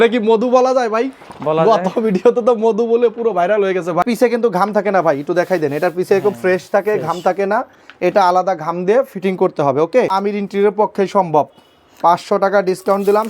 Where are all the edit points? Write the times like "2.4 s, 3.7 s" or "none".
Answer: 4.0 s, 10.1 s

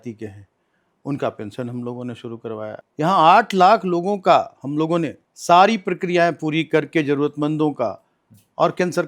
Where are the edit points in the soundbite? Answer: 2.8 s, 5.2 s

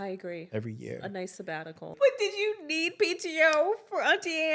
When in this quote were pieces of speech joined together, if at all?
1.9 s

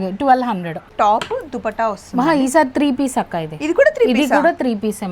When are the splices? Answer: 0.9 s

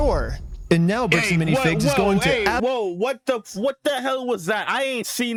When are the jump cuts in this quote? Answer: none

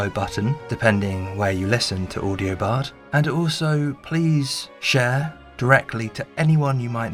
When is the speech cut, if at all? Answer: none

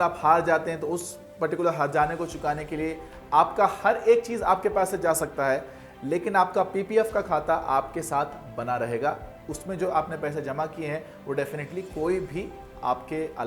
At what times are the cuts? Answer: none

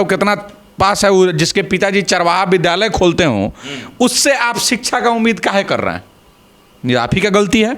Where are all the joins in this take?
none

